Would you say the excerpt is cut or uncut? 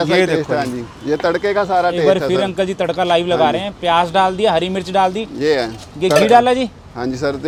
uncut